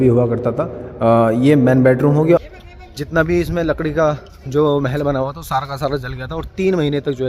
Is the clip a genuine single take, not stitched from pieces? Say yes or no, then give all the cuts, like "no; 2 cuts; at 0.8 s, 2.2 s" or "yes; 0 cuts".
no; 1 cut; at 2.2 s